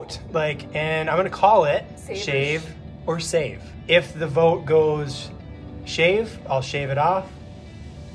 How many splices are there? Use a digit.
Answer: 2